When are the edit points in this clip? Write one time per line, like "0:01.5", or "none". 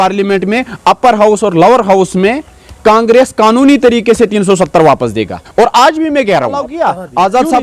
0:06.7